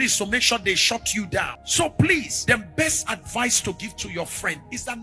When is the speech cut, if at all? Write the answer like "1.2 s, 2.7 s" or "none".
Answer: 1.6 s, 2.3 s